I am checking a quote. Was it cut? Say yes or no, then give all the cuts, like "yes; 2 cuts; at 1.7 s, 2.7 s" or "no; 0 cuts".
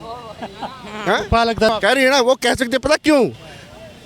yes; 1 cut; at 1.7 s